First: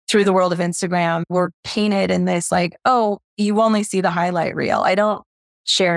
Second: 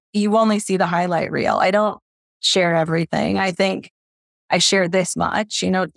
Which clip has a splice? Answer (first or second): first